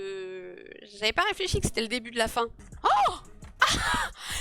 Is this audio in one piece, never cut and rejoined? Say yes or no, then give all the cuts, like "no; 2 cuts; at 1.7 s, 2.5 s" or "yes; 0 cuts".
no; 1 cut; at 2.6 s